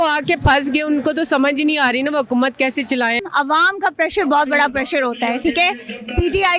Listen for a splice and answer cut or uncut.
cut